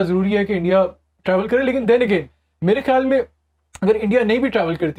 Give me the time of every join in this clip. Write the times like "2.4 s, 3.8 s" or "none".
none